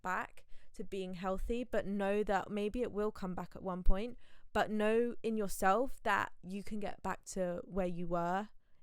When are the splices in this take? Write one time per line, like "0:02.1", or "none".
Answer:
none